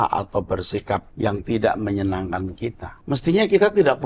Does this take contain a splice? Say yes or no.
yes